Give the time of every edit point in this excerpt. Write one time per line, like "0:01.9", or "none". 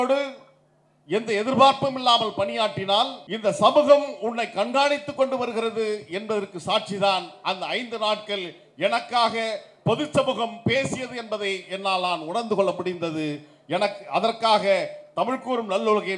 0:03.2